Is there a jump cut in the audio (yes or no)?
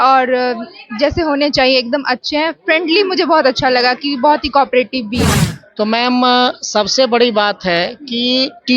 yes